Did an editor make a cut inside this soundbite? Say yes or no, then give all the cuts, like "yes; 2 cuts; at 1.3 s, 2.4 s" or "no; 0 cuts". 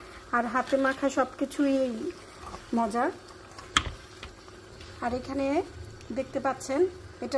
no; 0 cuts